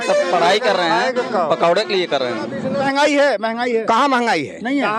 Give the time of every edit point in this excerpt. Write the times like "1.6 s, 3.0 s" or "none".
2.8 s